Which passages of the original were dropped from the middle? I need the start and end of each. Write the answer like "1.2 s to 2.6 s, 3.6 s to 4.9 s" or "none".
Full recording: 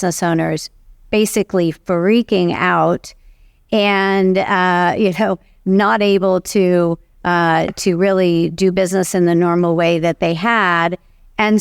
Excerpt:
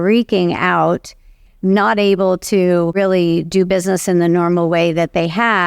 3.4 s to 5.5 s, 7.0 s to 8.0 s